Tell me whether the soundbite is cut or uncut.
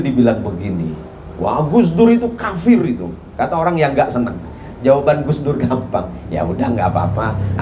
uncut